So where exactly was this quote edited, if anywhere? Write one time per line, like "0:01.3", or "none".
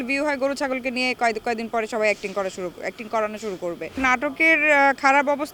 none